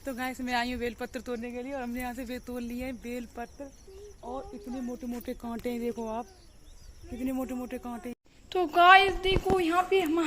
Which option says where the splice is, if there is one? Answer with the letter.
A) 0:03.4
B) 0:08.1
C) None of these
B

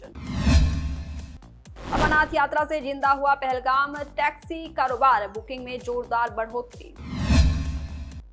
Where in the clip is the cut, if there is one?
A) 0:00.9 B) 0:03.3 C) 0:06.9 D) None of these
D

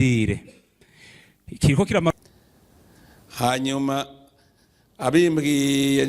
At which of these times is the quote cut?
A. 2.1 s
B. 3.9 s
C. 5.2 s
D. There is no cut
A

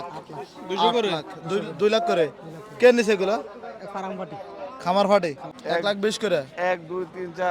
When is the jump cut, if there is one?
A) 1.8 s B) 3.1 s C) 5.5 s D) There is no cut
C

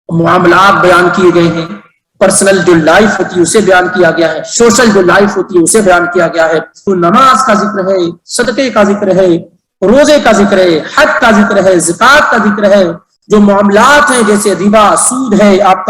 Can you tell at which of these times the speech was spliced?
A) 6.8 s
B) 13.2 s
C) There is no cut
A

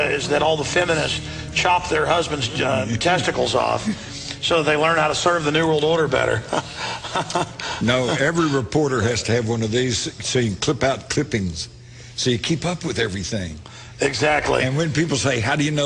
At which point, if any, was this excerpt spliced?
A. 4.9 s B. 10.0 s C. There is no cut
B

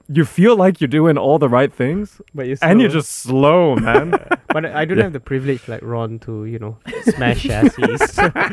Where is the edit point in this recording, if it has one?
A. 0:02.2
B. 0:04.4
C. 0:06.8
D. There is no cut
B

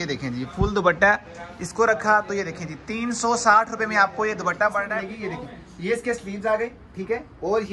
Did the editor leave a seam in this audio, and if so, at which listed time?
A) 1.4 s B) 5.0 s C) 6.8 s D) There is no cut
B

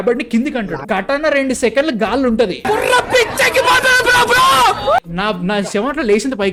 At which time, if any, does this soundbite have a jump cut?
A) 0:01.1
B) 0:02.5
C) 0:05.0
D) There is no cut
D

